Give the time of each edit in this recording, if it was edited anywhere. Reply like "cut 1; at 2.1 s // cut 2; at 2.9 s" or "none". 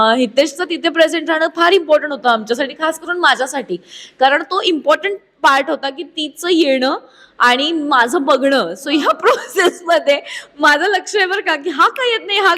none